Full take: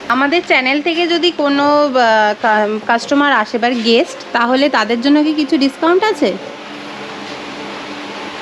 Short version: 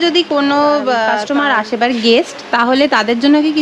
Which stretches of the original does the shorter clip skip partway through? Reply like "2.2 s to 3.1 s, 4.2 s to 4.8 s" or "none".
2.3 s to 3.0 s